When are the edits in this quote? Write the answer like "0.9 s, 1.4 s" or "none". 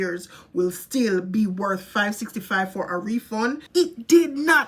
3.6 s